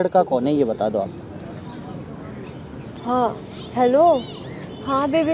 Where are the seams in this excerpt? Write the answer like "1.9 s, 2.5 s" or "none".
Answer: 3.0 s